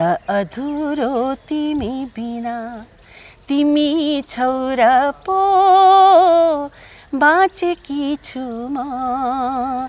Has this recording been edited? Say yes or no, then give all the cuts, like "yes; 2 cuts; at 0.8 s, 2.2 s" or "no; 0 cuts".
no; 0 cuts